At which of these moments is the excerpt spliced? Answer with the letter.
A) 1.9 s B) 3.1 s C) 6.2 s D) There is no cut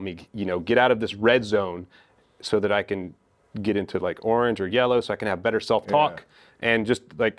D